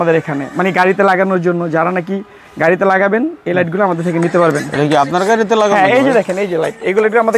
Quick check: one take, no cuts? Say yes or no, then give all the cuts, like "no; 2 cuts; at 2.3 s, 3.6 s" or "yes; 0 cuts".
yes; 0 cuts